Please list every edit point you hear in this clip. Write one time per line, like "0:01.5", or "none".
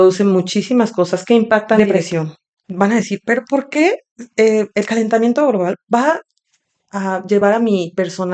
0:01.9